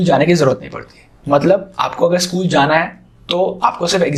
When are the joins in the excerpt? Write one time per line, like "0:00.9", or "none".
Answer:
none